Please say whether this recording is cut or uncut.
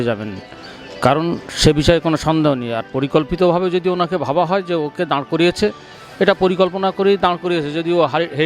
uncut